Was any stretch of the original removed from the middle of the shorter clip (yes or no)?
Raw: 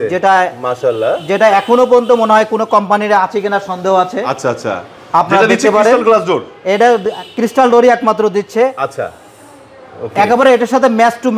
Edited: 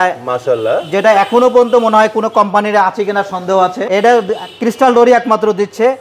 yes